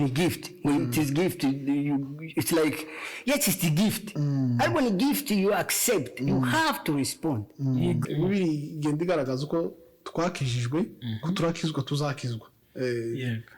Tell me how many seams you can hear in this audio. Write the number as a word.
one